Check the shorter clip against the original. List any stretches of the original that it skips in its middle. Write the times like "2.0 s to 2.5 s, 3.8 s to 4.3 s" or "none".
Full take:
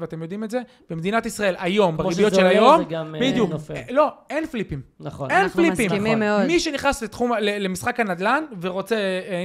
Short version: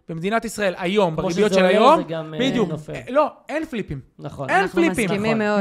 none